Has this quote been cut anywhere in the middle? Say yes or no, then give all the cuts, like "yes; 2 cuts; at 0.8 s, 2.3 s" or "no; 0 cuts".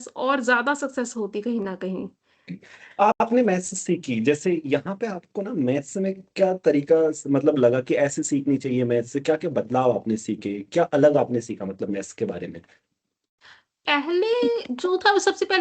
no; 0 cuts